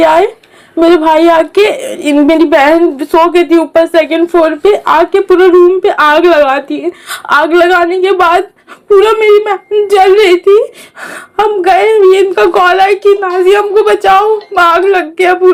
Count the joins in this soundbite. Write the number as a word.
zero